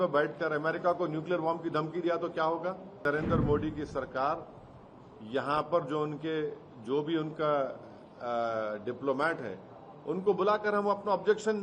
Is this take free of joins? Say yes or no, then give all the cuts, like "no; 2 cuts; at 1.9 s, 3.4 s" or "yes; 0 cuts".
no; 1 cut; at 3.0 s